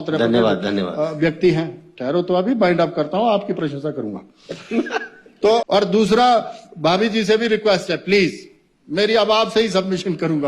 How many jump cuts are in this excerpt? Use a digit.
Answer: 1